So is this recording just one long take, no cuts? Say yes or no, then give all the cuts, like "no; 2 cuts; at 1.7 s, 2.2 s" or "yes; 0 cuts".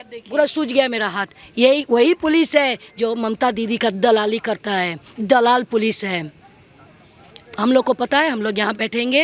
yes; 0 cuts